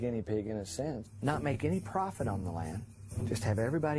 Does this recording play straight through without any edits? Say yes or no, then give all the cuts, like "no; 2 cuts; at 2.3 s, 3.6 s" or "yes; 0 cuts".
yes; 0 cuts